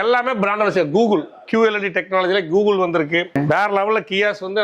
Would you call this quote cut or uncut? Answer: cut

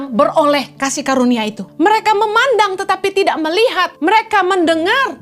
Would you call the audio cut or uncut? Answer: cut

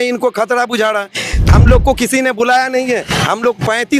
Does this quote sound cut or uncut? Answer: cut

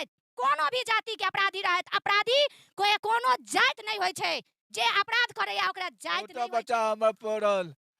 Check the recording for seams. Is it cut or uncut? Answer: cut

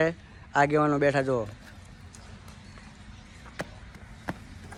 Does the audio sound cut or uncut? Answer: uncut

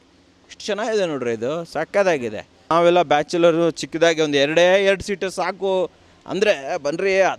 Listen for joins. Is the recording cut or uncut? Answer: cut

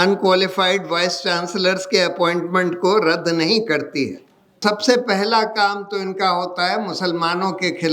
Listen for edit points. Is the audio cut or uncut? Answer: cut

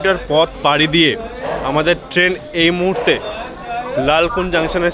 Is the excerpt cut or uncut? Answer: uncut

